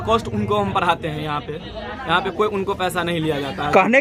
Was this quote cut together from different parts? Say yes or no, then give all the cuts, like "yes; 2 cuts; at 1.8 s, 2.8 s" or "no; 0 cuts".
no; 0 cuts